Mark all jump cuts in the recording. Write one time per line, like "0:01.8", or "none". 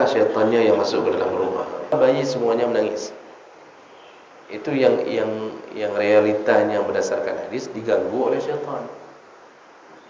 0:01.9